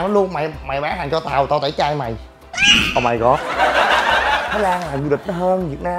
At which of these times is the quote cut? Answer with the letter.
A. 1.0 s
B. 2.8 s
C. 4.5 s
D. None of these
C